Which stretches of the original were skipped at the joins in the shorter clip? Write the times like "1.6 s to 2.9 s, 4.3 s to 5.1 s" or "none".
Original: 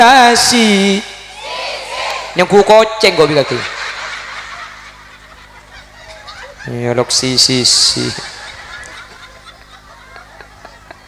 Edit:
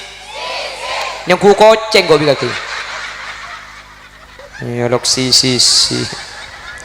5.5 s to 6.4 s